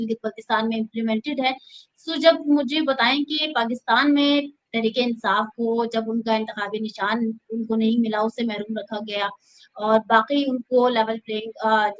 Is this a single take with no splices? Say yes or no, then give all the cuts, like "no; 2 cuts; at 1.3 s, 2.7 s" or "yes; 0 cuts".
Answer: yes; 0 cuts